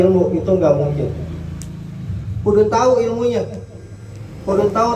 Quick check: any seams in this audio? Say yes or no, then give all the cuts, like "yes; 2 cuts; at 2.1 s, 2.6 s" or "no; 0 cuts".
no; 0 cuts